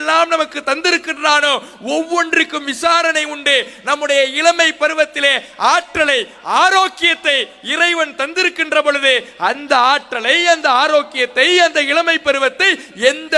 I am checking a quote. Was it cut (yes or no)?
no